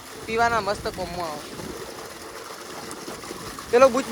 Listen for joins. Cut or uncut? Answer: uncut